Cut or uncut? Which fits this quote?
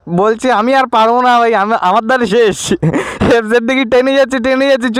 uncut